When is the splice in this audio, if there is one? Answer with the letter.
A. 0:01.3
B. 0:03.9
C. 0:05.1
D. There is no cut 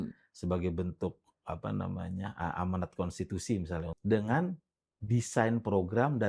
B